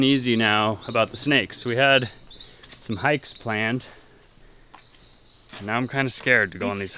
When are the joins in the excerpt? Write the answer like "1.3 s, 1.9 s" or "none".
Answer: none